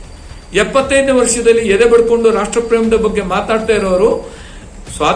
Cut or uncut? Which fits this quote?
uncut